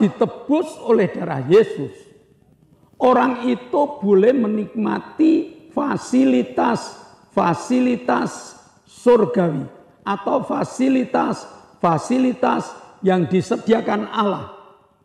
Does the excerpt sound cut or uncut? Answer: uncut